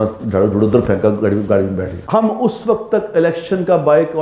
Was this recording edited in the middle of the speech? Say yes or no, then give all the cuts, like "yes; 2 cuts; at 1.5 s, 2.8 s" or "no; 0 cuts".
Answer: yes; 1 cut; at 2.0 s